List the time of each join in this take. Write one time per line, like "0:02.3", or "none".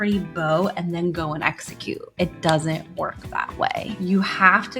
0:02.0
0:02.9
0:03.9